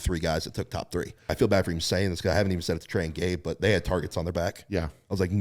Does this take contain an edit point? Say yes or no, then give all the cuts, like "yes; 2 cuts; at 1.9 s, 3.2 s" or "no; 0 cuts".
yes; 1 cut; at 1.3 s